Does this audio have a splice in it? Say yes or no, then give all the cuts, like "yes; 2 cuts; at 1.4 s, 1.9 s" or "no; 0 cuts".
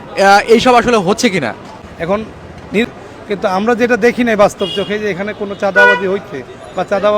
yes; 1 cut; at 2.9 s